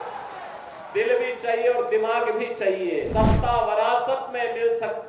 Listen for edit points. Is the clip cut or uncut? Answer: cut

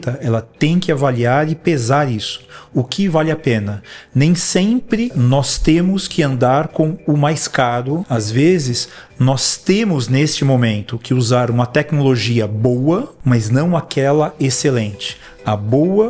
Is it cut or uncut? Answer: cut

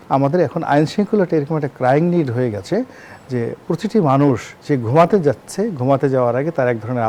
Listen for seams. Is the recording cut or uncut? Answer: uncut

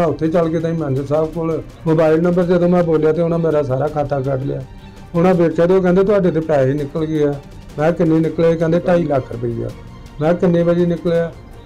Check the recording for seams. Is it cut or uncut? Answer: cut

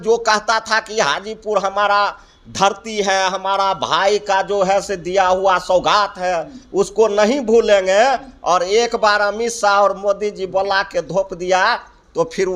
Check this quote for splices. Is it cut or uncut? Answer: uncut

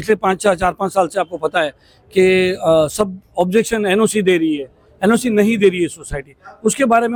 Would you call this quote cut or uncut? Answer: uncut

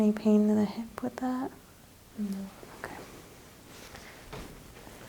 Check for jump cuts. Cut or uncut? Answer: uncut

